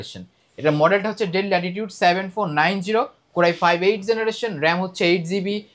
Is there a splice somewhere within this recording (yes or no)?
no